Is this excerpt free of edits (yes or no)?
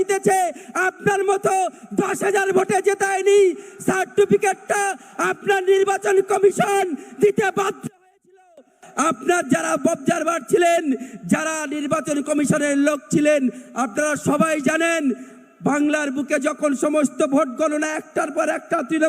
yes